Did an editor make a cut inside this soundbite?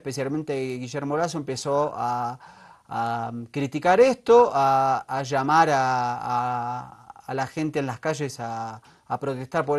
no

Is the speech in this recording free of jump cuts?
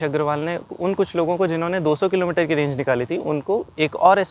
yes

